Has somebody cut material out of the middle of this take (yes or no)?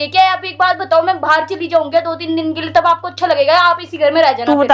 no